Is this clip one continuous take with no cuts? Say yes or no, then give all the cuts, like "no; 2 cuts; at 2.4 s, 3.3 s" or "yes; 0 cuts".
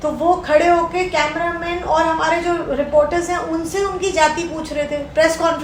yes; 0 cuts